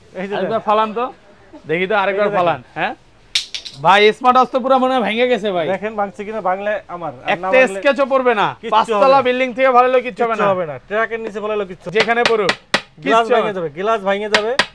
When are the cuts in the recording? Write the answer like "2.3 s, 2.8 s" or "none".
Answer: 11.9 s